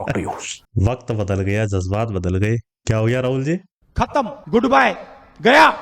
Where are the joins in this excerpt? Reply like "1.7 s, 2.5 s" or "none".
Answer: 4.3 s

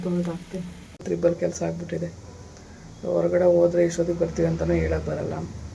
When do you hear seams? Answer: 1.0 s

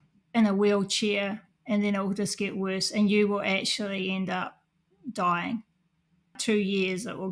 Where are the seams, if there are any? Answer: 6.4 s

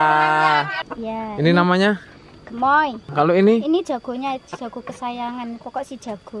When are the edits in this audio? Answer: 1.1 s, 3.0 s

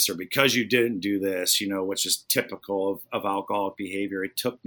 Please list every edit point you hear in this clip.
none

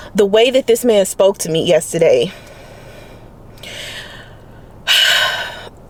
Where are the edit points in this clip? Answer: none

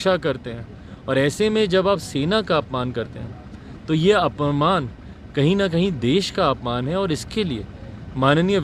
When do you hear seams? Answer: none

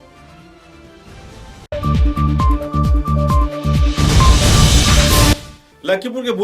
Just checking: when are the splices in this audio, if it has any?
5.5 s

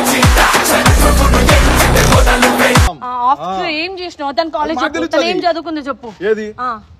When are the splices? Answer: 3.0 s

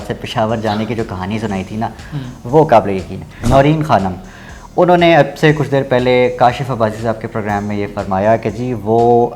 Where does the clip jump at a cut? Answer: 3.4 s

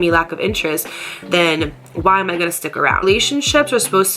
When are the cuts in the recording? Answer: 3.0 s

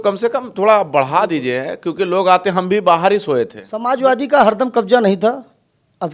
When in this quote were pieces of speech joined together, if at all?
3.7 s

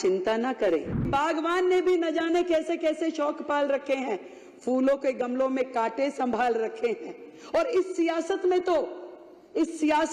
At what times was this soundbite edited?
1.1 s

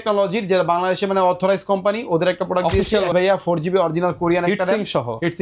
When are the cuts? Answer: 3.1 s

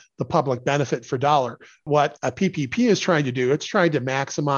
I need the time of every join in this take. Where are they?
1.9 s

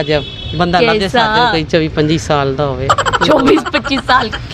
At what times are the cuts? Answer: none

